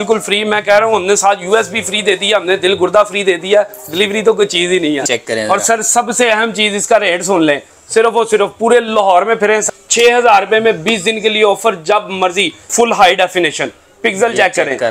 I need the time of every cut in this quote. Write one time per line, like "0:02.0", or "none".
0:05.1
0:09.6
0:12.7